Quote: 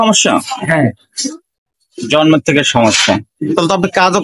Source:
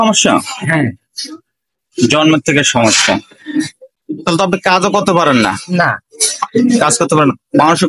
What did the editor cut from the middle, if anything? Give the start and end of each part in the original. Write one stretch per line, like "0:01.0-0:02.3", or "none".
0:03.3-0:04.0

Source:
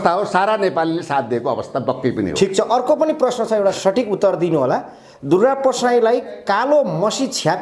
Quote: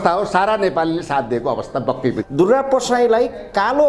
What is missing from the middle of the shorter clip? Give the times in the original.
0:02.2-0:05.2

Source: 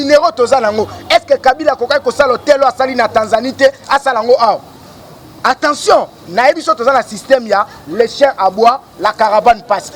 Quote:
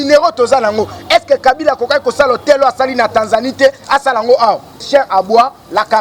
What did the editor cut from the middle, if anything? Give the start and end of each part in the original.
0:04.8-0:08.1

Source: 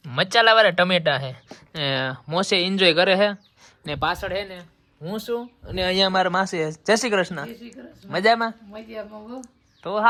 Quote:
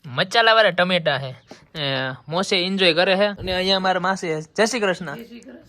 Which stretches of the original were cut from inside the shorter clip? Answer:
0:03.4-0:05.7

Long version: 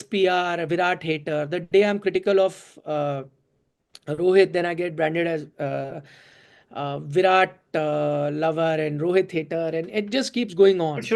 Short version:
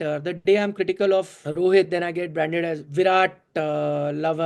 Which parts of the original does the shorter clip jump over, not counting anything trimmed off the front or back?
0:02.7-0:04.0
0:05.5-0:07.0

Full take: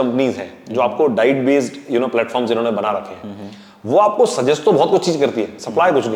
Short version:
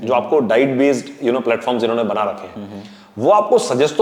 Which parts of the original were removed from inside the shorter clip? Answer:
none

